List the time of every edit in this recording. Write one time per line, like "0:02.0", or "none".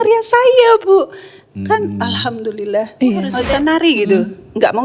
0:03.4